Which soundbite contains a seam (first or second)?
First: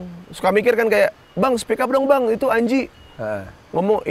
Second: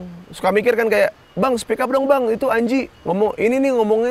second